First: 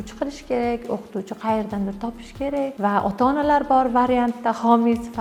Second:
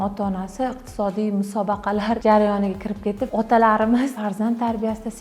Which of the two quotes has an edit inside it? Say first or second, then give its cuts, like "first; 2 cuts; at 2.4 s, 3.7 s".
second; 3 cuts; at 2.2 s, 3.2 s, 4.2 s